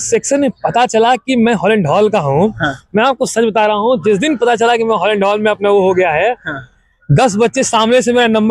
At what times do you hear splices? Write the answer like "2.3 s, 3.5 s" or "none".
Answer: none